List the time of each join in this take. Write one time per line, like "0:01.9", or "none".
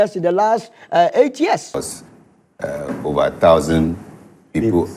0:01.7